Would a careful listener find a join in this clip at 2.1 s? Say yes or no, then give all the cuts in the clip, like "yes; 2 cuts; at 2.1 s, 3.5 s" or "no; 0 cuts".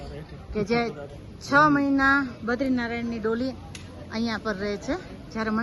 no; 0 cuts